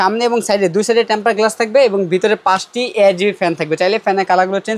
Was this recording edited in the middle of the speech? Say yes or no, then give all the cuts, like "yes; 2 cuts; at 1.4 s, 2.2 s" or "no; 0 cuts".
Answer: no; 0 cuts